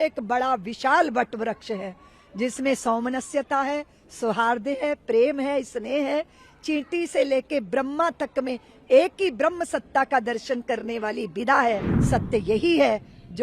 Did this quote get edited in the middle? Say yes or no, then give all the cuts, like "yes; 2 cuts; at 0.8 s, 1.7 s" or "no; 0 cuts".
yes; 1 cut; at 11.9 s